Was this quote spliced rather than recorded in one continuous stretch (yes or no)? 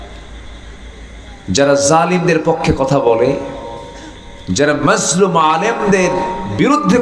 no